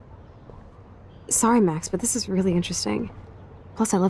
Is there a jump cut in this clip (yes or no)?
yes